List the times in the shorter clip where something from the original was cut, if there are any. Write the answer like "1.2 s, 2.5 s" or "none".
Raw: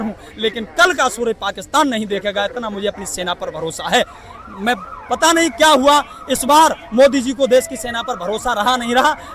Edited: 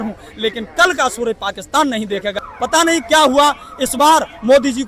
2.4 s